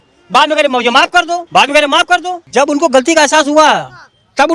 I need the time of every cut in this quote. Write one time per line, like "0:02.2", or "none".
0:02.4